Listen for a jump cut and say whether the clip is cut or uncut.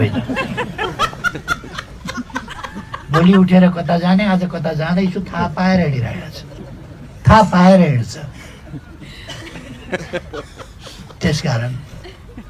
uncut